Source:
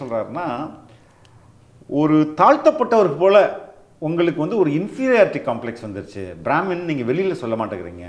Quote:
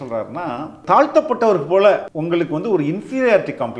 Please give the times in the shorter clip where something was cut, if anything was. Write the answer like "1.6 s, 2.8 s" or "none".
0.8 s, 2.1 s